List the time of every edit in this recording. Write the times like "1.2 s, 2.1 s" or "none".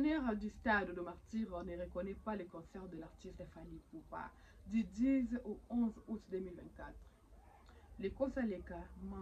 none